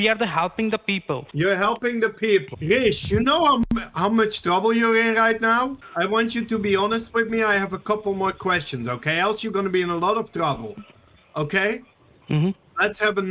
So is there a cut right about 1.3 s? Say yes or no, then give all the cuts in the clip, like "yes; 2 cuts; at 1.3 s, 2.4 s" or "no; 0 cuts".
yes; 3 cuts; at 1.3 s, 2.5 s, 5.8 s